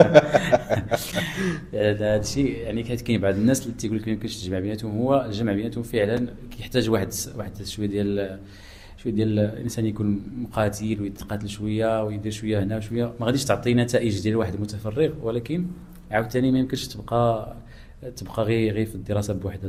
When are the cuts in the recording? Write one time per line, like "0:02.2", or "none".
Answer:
none